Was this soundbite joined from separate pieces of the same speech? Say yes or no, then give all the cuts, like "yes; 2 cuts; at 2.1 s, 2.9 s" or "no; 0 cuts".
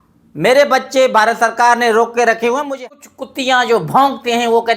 yes; 1 cut; at 2.7 s